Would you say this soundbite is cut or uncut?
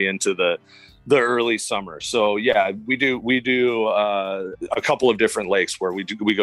cut